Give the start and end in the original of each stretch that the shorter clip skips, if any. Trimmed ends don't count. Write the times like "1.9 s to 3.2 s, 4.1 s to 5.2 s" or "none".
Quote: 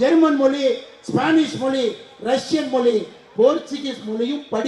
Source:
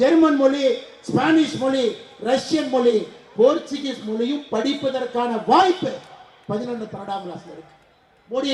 none